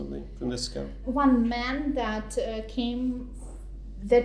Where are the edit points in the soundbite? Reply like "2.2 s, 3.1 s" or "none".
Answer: 1.0 s